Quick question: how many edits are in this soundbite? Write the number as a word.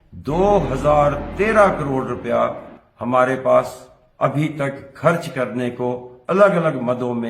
zero